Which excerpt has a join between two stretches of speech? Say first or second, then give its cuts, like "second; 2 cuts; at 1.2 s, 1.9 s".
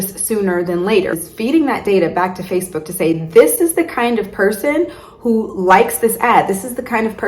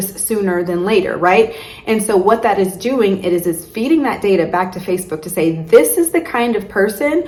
first; 1 cut; at 1.2 s